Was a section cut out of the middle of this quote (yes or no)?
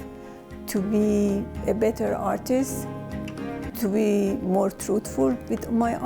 yes